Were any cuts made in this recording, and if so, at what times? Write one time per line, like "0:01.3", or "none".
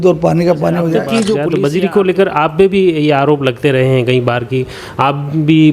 0:01.5